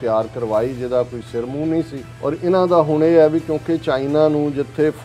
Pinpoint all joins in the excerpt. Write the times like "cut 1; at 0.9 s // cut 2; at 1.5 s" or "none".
cut 1; at 2.0 s